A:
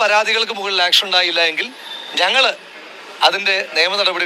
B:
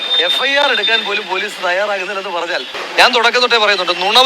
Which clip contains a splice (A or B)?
B